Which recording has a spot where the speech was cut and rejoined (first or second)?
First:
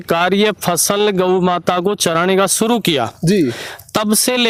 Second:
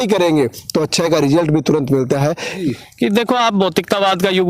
second